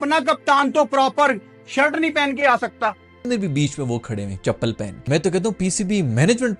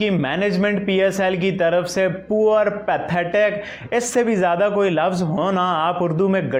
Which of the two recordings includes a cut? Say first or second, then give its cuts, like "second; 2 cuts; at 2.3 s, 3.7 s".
first; 1 cut; at 3.3 s